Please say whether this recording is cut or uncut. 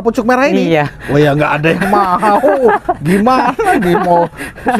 uncut